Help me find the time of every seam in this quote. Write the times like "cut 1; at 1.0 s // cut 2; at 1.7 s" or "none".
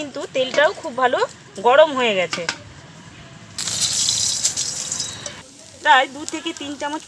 cut 1; at 5.4 s